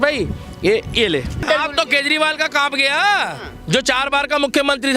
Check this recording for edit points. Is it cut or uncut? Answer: cut